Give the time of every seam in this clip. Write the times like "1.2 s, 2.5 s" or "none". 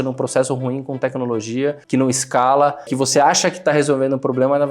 2.9 s